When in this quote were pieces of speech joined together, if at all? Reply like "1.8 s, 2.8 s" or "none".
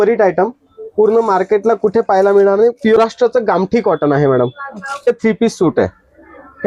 3.0 s, 5.1 s